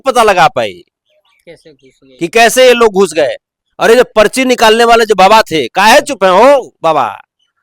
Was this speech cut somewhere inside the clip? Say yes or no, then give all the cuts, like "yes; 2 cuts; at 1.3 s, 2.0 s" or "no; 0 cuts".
no; 0 cuts